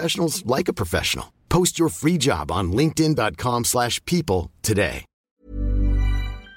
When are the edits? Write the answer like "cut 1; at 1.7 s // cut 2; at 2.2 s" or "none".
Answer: cut 1; at 5.4 s